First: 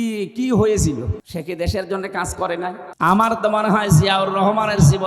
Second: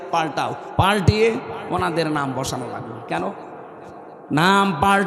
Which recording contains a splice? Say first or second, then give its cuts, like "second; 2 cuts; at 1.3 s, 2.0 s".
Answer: first; 2 cuts; at 1.2 s, 2.9 s